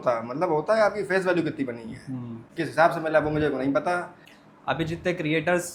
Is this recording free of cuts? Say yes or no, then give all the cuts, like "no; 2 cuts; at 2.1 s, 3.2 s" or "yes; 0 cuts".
yes; 0 cuts